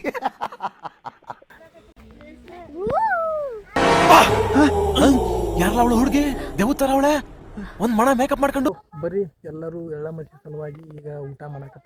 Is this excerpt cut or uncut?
cut